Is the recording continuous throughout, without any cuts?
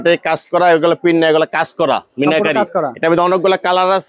yes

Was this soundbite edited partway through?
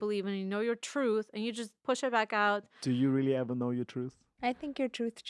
yes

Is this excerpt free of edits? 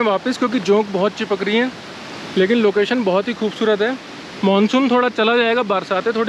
yes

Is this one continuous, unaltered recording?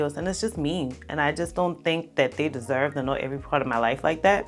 yes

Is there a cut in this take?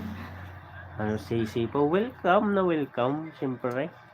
no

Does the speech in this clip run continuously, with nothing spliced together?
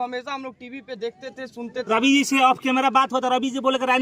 no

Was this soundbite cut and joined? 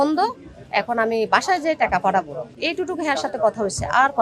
yes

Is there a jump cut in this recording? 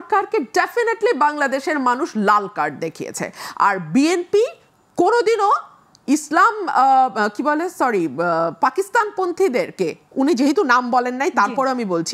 no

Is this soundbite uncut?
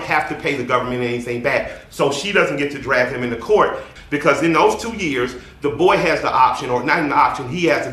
no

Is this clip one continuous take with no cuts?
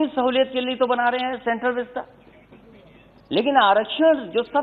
yes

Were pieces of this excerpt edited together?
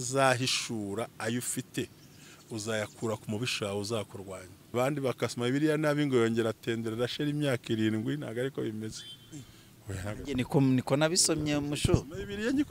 yes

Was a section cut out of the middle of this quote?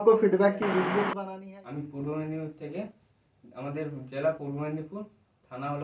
yes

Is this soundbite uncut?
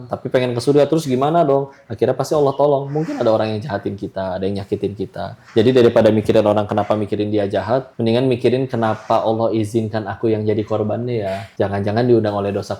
no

